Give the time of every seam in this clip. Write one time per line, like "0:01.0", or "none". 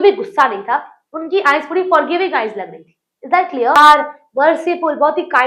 0:03.8